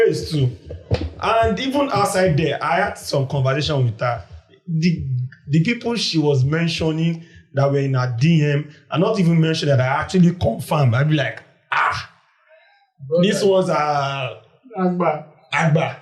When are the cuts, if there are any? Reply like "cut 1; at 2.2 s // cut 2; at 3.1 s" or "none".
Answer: none